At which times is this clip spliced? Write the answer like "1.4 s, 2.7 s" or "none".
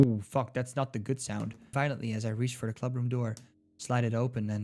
1.7 s